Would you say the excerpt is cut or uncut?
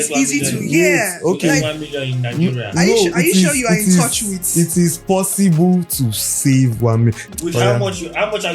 cut